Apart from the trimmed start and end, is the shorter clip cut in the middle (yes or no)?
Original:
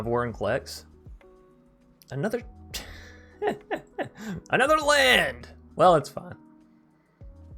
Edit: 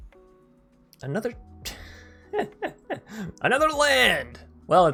no